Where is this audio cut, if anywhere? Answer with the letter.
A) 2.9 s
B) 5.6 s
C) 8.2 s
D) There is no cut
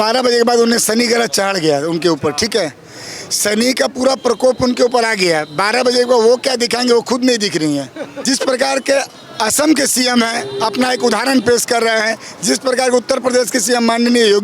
C